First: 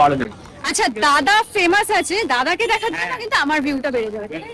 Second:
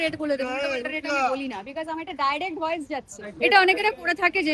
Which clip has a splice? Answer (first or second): second